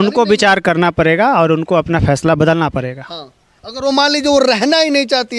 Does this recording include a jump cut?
no; 0 cuts

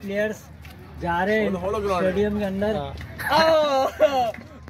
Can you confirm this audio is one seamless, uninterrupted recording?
yes; 0 cuts

